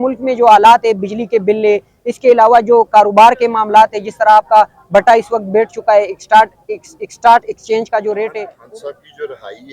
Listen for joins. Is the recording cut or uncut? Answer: cut